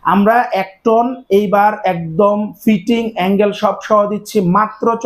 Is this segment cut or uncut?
uncut